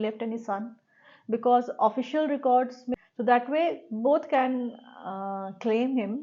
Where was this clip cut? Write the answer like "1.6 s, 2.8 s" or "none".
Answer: 2.8 s